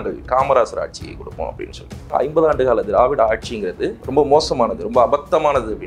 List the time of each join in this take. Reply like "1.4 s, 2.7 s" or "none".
2.1 s, 3.9 s